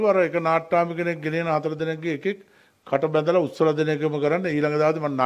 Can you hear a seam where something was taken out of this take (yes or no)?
no